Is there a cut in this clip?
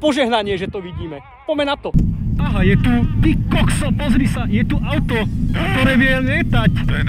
yes; 1 cut; at 1.9 s

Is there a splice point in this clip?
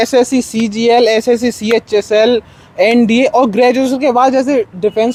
no; 0 cuts

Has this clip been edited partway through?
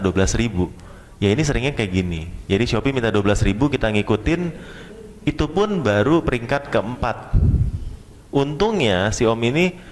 no; 0 cuts

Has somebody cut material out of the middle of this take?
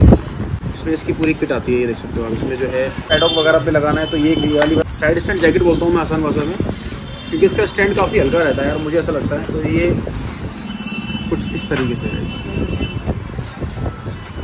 no; 0 cuts

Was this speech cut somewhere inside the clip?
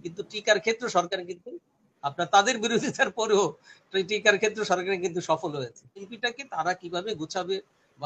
yes; 1 cut; at 6.1 s

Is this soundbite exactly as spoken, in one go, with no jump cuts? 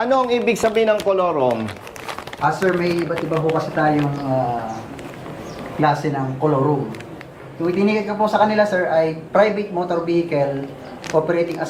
yes; 0 cuts

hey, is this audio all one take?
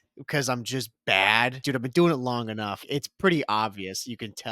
no; 2 cuts; at 1.6 s, 2.8 s

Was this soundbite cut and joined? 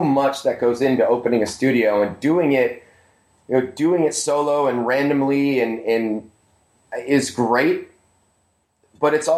no; 0 cuts

